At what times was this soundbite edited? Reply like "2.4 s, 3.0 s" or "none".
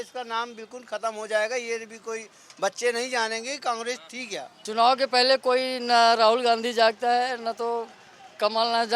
4.5 s